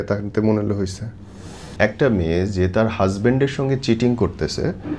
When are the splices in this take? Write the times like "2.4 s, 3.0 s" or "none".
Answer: 1.7 s